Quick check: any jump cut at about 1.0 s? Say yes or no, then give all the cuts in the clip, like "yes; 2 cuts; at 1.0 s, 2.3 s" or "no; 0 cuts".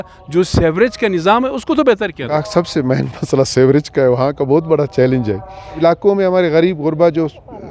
no; 2 cuts; at 2.3 s, 5.8 s